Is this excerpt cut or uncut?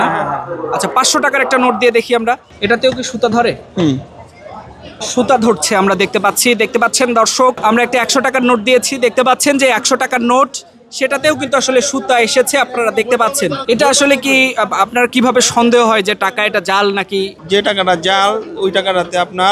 cut